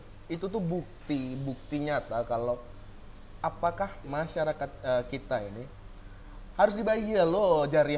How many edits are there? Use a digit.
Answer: 1